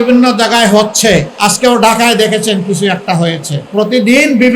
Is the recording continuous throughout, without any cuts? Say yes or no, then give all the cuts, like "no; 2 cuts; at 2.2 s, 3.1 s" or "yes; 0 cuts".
no; 2 cuts; at 1.3 s, 3.5 s